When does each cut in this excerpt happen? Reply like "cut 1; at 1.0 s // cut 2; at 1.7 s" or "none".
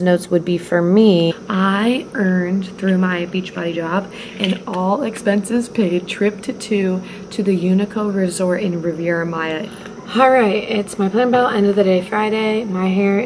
cut 1; at 1.4 s // cut 2; at 9.7 s